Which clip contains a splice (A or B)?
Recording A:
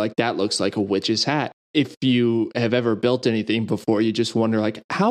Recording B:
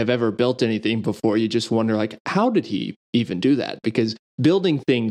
A